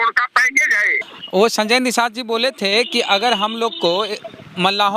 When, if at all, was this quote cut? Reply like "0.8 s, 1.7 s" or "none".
0.9 s